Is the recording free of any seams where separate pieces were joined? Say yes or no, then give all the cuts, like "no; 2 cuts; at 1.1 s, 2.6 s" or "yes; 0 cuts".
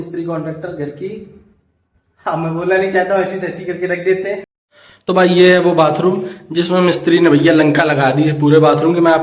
no; 1 cut; at 4.5 s